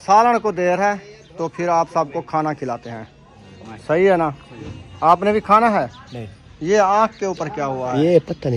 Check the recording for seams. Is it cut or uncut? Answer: uncut